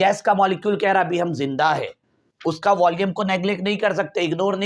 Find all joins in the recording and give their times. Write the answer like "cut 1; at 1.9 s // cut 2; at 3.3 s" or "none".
none